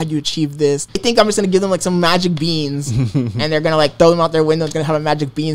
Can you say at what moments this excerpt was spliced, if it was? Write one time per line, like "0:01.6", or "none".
0:01.0